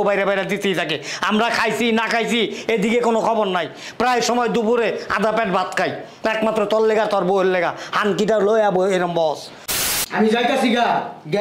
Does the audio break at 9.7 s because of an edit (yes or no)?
yes